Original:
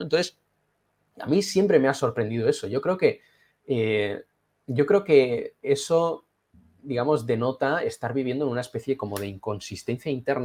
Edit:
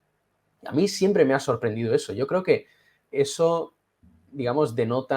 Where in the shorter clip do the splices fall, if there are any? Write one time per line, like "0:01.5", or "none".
0:03.0